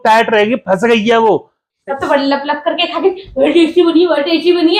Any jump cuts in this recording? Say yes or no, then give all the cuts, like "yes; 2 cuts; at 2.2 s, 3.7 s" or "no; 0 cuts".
yes; 1 cut; at 1.7 s